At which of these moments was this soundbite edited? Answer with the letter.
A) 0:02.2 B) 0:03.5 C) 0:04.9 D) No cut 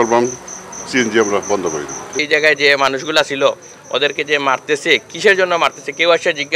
A